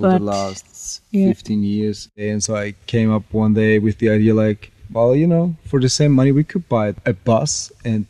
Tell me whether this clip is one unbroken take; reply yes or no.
no